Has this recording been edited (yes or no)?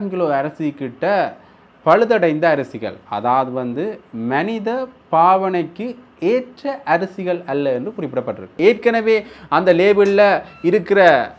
yes